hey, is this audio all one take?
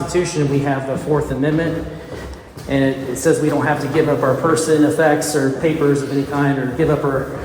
yes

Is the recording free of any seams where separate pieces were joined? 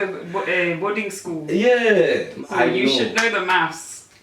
no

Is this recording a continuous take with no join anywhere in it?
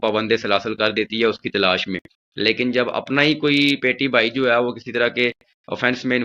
yes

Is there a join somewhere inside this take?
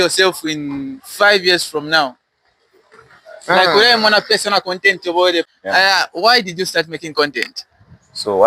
yes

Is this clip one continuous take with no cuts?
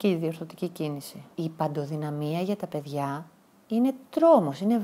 no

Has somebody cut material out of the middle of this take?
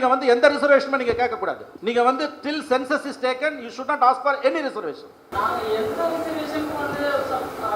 yes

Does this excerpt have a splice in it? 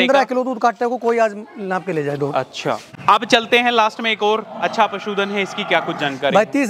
yes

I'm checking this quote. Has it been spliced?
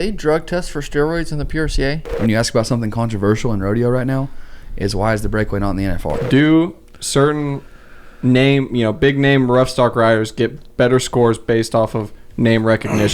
yes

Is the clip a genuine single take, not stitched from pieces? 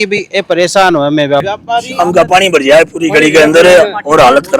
no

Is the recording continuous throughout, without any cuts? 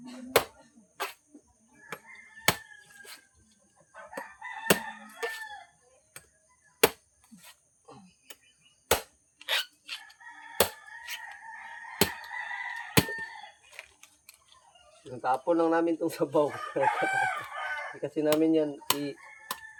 yes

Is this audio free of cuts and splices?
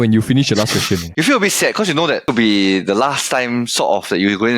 no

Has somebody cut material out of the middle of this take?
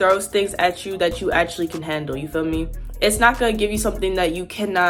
no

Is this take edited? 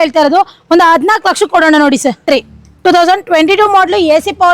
yes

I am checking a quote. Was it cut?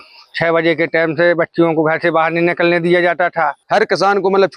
yes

